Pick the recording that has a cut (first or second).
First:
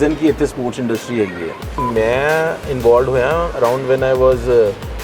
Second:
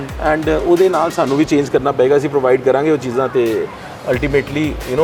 first